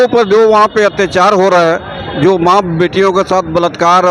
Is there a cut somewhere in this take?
no; 0 cuts

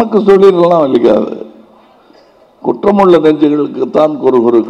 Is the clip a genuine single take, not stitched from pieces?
yes; 0 cuts

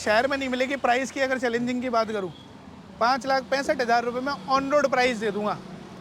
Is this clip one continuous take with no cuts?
yes; 0 cuts

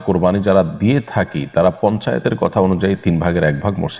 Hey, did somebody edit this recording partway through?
no; 0 cuts

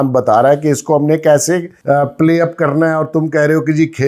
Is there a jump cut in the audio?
yes; 1 cut; at 1.7 s

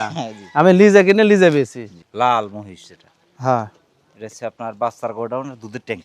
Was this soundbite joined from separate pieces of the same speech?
yes; 1 cut; at 1.9 s

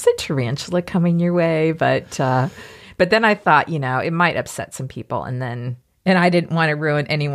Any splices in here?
no; 0 cuts

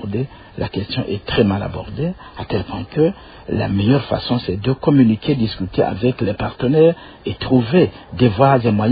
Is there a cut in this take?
no; 0 cuts

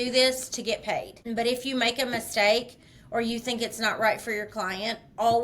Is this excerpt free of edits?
no; 1 cut; at 1.2 s

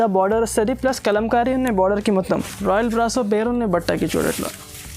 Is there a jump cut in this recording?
yes; 1 cut; at 2.4 s

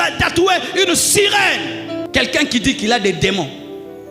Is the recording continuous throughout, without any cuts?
no; 1 cut; at 2.0 s

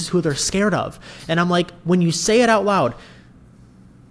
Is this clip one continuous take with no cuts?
yes; 0 cuts

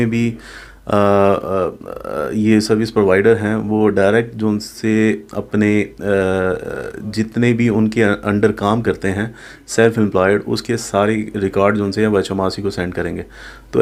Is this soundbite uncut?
yes; 0 cuts

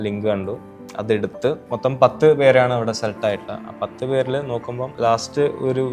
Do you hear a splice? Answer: yes; 2 cuts; at 1.6 s, 4.8 s

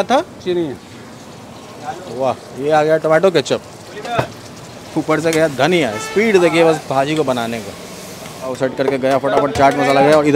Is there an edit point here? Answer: yes; 1 cut; at 8.6 s

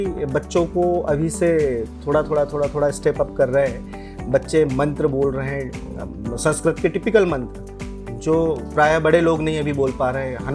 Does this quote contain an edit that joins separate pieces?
no; 0 cuts

